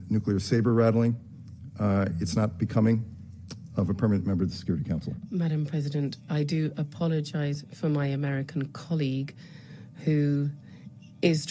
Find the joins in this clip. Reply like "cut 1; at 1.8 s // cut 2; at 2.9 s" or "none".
cut 1; at 5.2 s